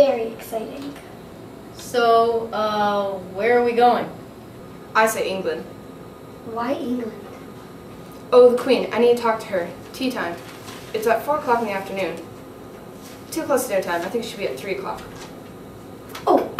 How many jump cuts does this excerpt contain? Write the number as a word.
one